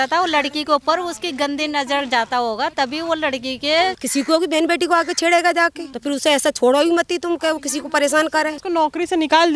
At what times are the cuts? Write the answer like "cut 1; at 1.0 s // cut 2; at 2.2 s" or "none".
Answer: cut 1; at 4.0 s // cut 2; at 5.9 s // cut 3; at 8.6 s